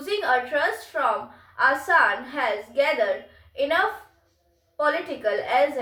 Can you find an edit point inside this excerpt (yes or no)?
no